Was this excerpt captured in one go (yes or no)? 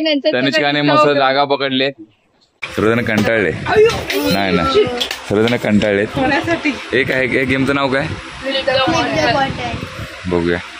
no